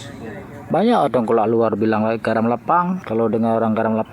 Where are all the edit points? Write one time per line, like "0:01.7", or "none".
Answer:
0:03.0